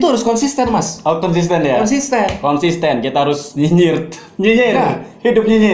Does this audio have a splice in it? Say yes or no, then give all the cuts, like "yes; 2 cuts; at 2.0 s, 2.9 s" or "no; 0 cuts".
no; 0 cuts